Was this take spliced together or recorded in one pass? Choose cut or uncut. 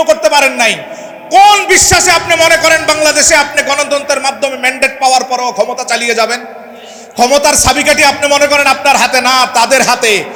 uncut